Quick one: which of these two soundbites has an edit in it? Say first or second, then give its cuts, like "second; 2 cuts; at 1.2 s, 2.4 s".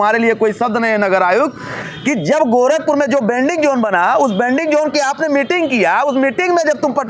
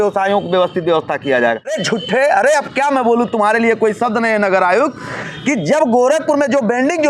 second; 1 cut; at 1.8 s